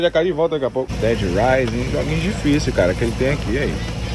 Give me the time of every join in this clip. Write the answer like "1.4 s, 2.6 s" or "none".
0.9 s